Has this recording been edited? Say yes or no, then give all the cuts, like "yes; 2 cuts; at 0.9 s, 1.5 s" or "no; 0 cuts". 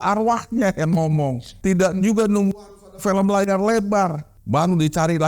yes; 2 cuts; at 1.5 s, 4.3 s